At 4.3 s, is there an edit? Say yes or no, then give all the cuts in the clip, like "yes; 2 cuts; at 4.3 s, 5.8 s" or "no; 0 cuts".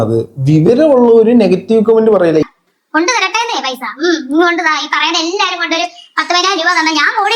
no; 1 cut; at 2.4 s